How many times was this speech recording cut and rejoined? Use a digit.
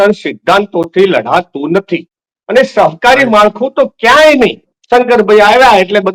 1